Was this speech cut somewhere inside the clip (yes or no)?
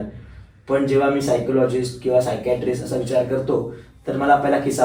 no